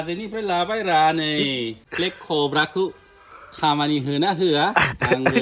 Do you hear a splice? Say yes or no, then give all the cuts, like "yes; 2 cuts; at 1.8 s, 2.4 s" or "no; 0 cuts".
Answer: yes; 1 cut; at 1.8 s